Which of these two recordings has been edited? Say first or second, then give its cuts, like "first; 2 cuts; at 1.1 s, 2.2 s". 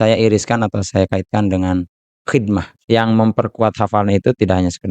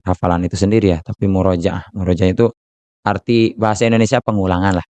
first; 1 cut; at 2.7 s